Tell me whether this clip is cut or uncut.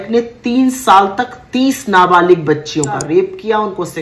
cut